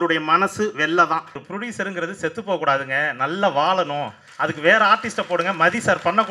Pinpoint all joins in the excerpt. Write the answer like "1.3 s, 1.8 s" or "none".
1.5 s